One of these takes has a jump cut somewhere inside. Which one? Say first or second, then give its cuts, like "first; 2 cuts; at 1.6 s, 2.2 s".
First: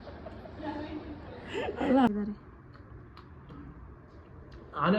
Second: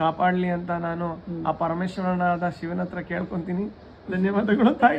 first; 1 cut; at 2.1 s